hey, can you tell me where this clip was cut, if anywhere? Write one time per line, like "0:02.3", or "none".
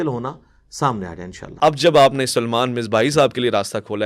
0:01.4